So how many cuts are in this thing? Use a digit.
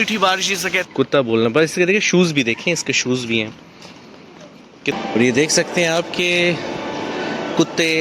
2